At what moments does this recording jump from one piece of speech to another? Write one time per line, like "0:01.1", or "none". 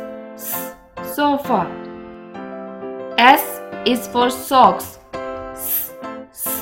0:01.1

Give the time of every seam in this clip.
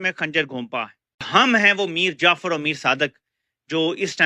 0:01.3

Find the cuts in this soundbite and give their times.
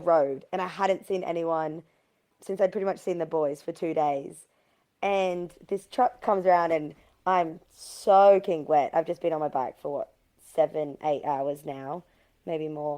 none

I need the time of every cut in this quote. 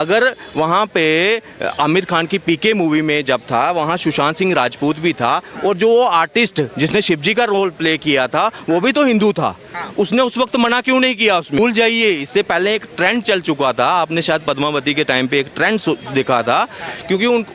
0:11.6

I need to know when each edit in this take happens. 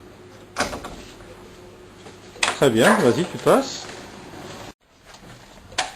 0:04.7

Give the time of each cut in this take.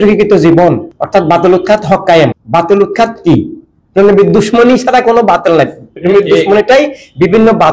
0:00.9
0:02.4

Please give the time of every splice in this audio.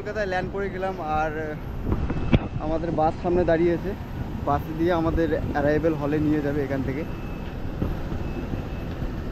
none

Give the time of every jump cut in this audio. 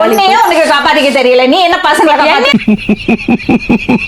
none

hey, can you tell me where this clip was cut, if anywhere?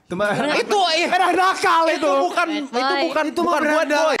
none

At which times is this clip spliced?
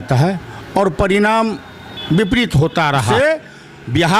0:03.1

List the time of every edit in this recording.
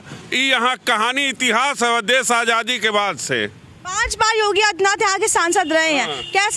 none

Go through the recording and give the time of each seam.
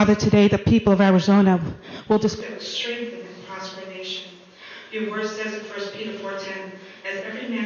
0:02.4

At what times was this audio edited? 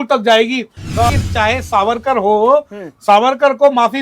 0:01.1

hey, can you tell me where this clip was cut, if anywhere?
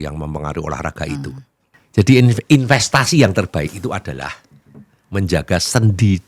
0:01.8

